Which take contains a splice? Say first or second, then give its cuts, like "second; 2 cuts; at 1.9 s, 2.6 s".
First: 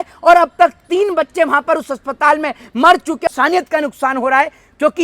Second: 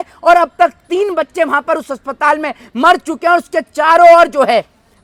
first; 1 cut; at 3.3 s